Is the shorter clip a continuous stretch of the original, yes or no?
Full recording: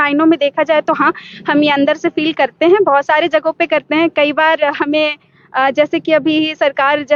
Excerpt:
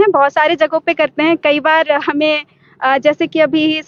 yes